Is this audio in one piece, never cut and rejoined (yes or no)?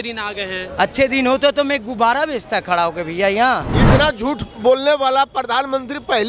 no